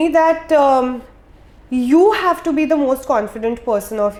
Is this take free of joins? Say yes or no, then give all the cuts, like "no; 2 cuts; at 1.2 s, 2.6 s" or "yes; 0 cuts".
yes; 0 cuts